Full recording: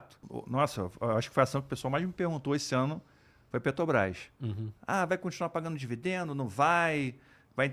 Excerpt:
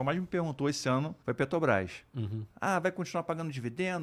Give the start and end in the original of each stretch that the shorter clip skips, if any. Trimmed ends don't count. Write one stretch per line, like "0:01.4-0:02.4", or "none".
0:03.0-0:03.4